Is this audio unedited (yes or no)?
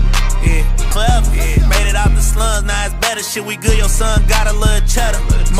no